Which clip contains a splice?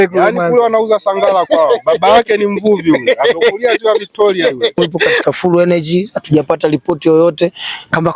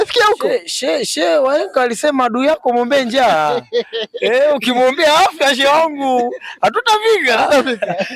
first; 1 cut; at 5.2 s

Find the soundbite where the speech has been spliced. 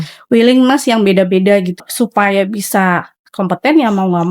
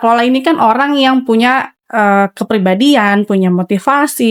first; 1 cut; at 1.8 s

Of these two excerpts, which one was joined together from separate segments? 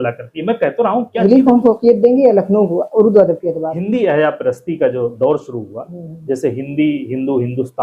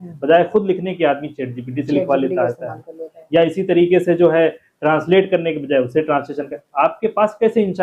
first; 2 cuts; at 1.1 s, 3.7 s

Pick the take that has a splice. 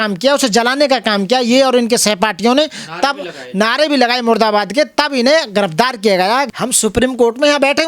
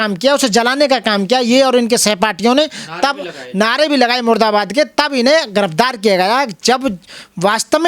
first; 1 cut; at 6.5 s

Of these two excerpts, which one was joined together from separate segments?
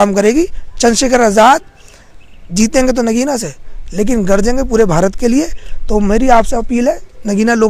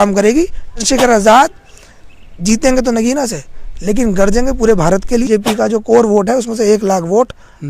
second; 2 cuts; at 0.8 s, 5.3 s

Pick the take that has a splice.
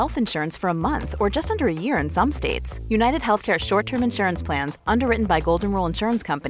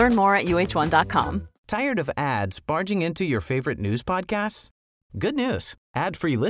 second; 1 cut; at 1.5 s

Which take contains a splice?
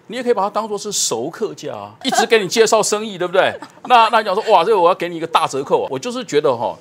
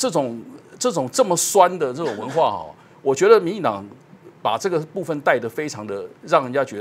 first; 2 cuts; at 2.1 s, 5.9 s

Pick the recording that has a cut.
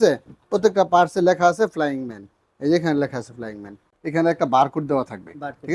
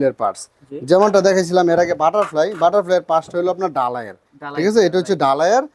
first; 1 cut; at 4.0 s

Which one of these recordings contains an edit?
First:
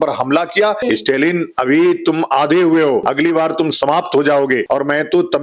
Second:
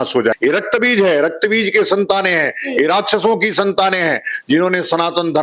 first; 3 cuts; at 0.8 s, 3.1 s, 4.6 s

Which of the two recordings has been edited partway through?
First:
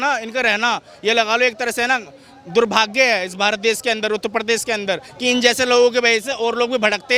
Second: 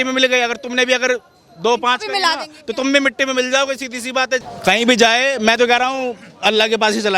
second; 1 cut; at 4.4 s

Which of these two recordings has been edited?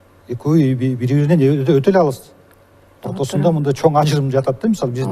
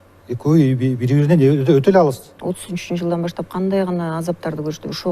second; 1 cut; at 2.3 s

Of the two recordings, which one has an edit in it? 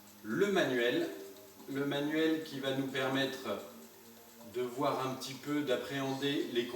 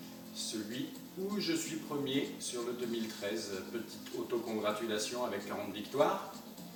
first; 1 cut; at 5.4 s

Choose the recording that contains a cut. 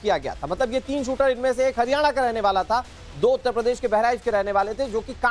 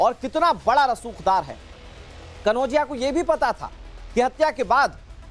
first; 1 cut; at 4.4 s

